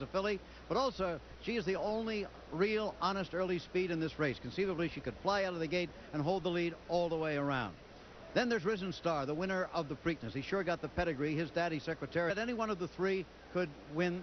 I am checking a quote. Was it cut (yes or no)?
no